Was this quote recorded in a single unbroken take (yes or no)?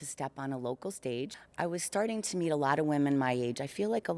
no